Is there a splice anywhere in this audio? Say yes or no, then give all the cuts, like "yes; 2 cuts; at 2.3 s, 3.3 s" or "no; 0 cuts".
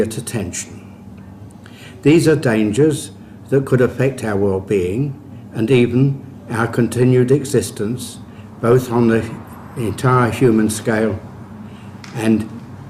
yes; 1 cut; at 8.0 s